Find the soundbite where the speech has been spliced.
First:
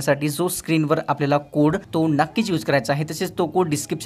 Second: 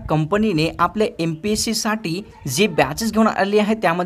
first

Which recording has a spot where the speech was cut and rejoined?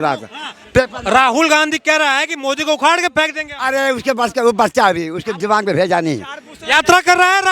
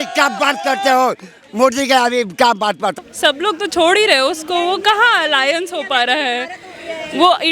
second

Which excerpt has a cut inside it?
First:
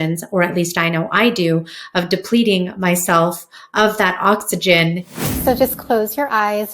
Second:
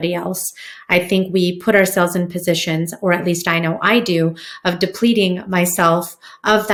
first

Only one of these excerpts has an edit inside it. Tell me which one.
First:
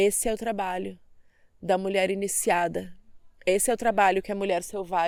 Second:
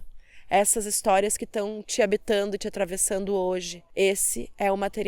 second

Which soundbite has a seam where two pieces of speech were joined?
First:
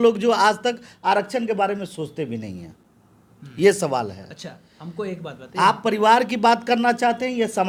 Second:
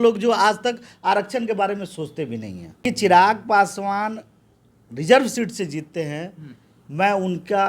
second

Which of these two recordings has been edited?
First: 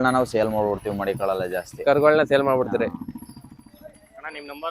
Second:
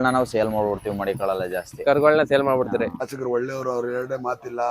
second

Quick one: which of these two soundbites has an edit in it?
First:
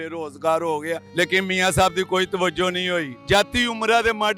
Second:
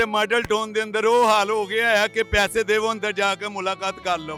first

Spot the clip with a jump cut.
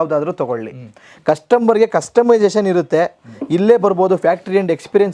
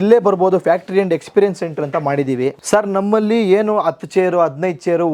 second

